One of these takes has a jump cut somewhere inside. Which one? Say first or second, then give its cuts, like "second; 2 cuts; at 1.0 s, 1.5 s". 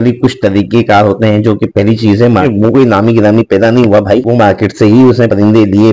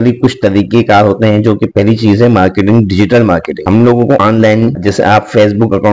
first; 1 cut; at 2.4 s